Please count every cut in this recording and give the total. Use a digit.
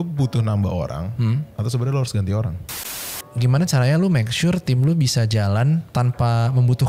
2